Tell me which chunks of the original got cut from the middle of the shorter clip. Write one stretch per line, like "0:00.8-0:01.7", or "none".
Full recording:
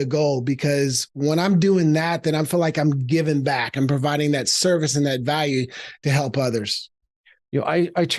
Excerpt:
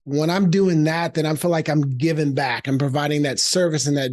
none